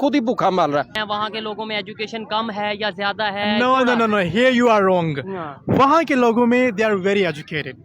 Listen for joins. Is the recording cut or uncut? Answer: cut